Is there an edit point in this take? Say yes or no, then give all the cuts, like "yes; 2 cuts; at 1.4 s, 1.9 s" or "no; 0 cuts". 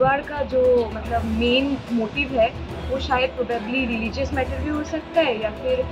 no; 0 cuts